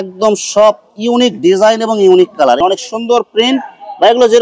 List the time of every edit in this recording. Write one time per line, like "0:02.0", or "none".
0:02.6